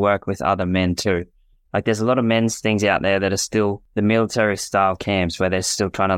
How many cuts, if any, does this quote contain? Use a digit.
2